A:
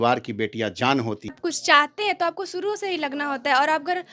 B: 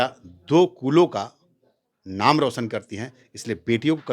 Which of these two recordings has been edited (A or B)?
A